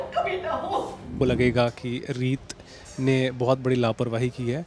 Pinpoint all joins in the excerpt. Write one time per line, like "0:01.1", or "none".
0:01.1